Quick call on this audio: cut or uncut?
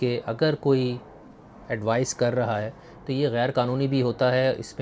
uncut